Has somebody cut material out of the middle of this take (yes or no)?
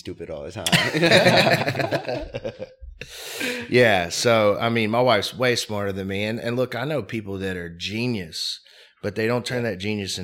no